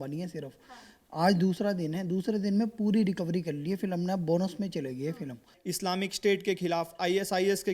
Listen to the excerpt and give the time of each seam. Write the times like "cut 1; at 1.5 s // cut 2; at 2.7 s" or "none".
cut 1; at 5.5 s